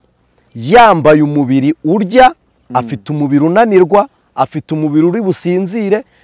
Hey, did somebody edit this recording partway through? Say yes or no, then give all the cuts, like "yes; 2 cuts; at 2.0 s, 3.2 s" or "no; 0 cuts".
no; 0 cuts